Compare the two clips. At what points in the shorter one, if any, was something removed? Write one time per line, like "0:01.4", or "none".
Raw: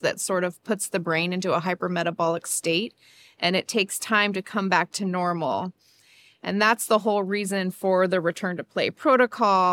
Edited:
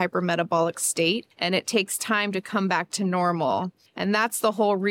0:01.3
0:03.8